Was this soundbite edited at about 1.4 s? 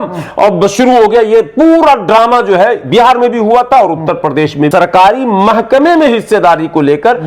no; 1 cut; at 4.7 s

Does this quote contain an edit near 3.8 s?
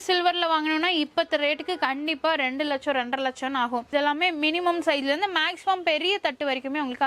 yes; 1 cut; at 3.8 s

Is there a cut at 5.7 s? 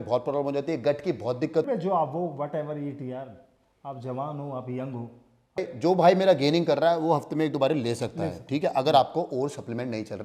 yes; 2 cuts; at 1.7 s, 5.7 s

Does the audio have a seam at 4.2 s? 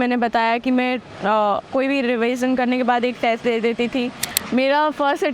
yes; 1 cut; at 4.2 s

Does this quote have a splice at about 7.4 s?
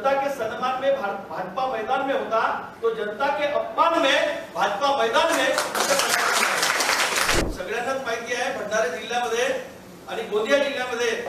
yes; 1 cut; at 7.4 s

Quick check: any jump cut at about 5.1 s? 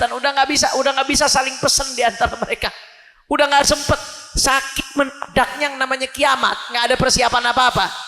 no; 0 cuts

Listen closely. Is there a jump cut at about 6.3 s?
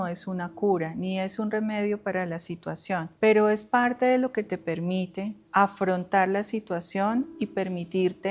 no; 0 cuts

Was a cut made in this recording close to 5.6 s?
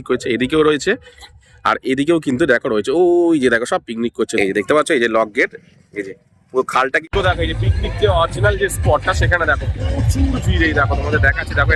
no; 2 cuts; at 4.3 s, 7.0 s

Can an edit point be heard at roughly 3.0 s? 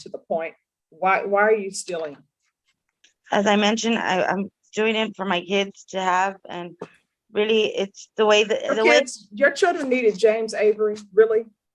yes; 1 cut; at 3.0 s

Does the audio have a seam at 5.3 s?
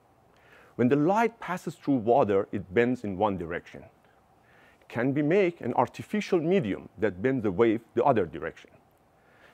yes; 1 cut; at 5.3 s

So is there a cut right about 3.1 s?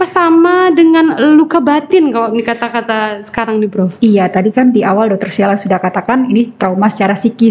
no; 0 cuts

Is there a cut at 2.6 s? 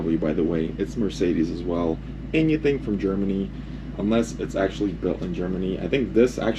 no; 0 cuts

